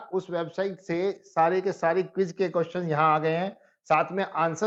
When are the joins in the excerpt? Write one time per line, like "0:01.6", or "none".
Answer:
none